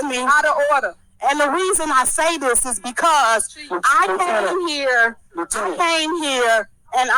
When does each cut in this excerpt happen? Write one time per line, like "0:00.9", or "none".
0:03.2